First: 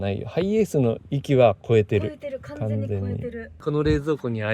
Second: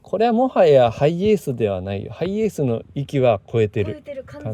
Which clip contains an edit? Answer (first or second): first